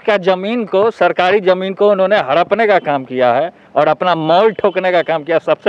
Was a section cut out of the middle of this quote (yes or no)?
no